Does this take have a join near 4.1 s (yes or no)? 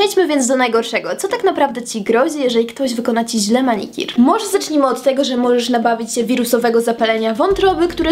no